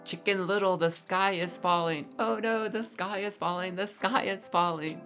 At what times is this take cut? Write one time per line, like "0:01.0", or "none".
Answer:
none